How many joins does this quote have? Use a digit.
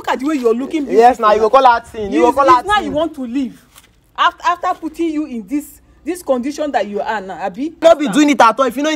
1